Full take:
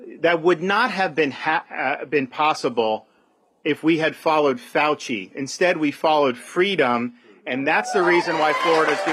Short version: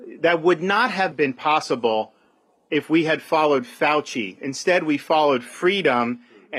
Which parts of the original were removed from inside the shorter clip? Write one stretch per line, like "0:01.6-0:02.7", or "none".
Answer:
0:01.1-0:02.1